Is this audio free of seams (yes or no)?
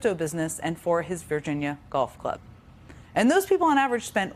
no